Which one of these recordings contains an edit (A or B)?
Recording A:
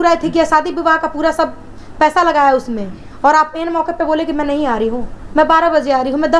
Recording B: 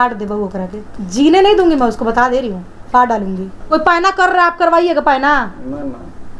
B